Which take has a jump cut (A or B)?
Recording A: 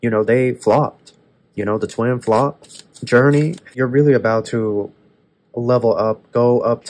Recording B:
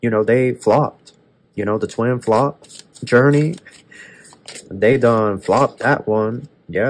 A